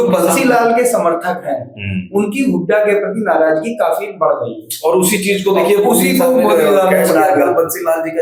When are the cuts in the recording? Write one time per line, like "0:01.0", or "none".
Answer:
none